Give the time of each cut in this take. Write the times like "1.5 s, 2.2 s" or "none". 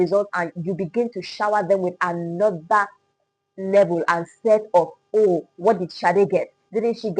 none